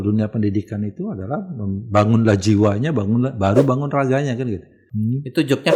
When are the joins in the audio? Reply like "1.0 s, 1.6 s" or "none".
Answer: 4.8 s